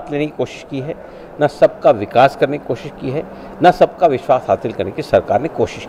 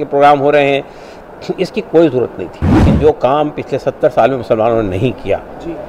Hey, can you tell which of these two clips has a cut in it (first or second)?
second